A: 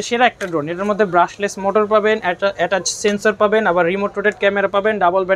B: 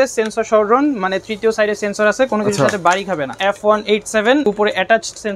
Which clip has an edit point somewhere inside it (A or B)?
B